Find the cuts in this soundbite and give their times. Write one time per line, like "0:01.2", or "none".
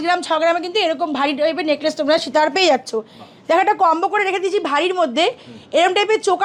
none